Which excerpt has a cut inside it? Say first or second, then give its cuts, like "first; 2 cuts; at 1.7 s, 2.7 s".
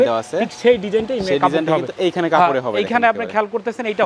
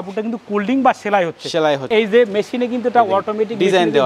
second; 1 cut; at 1.8 s